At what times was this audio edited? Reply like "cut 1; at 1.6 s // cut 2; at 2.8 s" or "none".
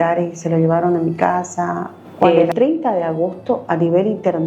cut 1; at 2.2 s